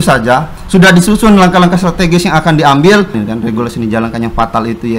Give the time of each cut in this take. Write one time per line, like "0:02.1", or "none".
0:03.2